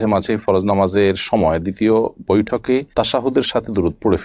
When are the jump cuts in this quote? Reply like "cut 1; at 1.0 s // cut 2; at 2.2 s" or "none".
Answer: none